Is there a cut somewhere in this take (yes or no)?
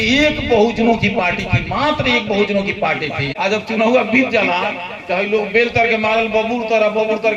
yes